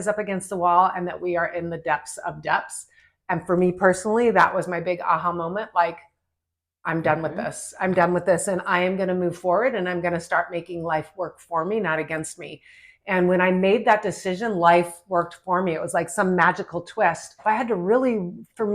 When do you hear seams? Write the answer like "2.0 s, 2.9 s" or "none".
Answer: 17.3 s